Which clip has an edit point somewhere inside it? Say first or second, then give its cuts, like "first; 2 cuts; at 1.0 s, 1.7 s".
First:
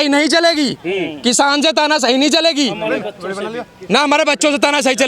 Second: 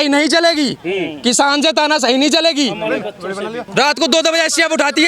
second; 1 cut; at 3.6 s